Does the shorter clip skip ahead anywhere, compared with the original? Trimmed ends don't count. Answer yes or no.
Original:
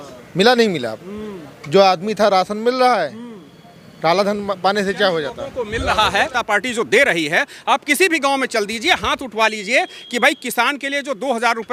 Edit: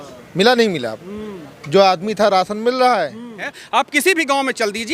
yes